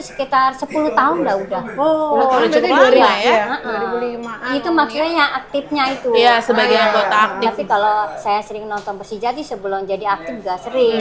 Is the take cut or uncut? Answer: uncut